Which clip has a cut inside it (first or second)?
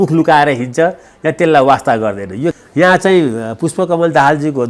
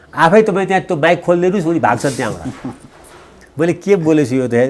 first